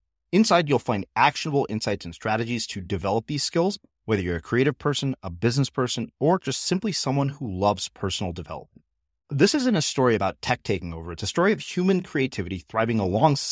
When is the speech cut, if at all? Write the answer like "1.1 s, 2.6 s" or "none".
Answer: none